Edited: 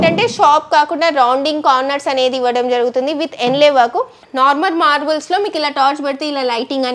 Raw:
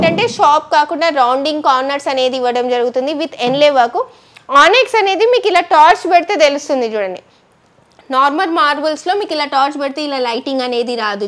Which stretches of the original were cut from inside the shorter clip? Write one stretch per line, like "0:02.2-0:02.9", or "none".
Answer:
0:04.2-0:08.0